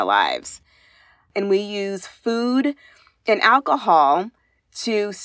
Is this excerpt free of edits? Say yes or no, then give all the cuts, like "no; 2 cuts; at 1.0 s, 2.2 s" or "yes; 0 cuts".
no; 1 cut; at 1.2 s